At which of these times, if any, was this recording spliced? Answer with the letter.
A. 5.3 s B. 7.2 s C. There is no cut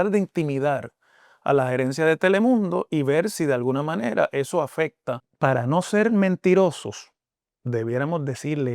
A